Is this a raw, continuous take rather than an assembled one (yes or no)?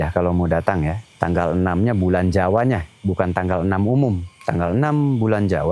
no